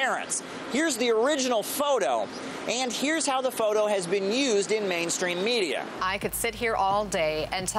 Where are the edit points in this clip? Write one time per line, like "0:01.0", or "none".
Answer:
0:02.9